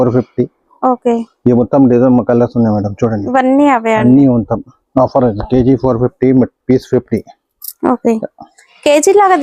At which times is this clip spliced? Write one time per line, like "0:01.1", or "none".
none